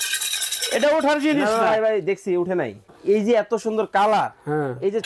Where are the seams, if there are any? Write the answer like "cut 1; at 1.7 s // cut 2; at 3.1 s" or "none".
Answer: cut 1; at 2.9 s